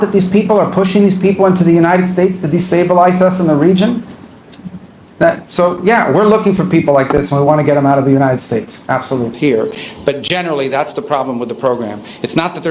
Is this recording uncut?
no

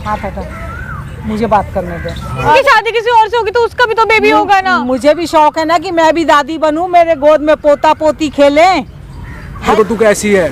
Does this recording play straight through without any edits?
no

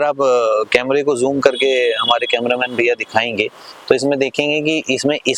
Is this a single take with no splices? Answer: yes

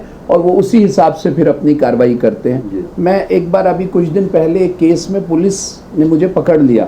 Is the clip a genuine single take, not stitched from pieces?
no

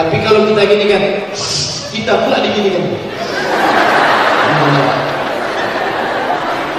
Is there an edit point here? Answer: no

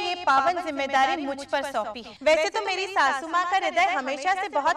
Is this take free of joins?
no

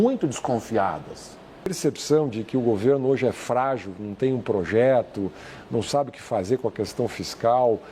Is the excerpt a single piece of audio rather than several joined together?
no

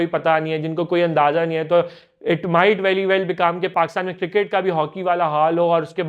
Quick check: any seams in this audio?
yes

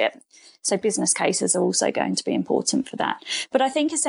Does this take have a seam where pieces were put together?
no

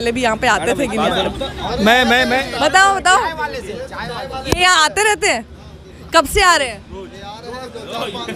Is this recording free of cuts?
yes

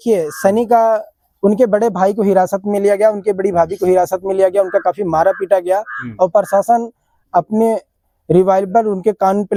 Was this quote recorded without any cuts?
yes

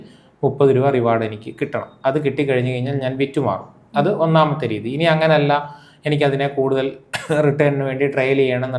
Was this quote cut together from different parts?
no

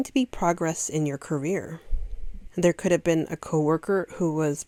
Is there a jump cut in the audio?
no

